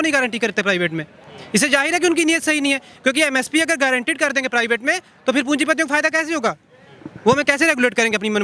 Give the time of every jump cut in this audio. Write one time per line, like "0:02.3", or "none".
none